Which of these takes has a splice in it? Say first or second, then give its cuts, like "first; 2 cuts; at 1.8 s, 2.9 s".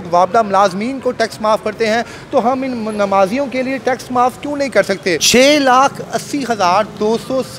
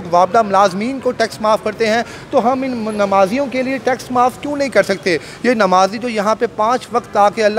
first; 1 cut; at 5.2 s